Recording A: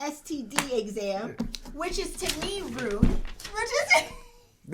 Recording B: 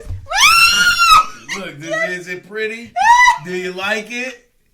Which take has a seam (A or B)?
B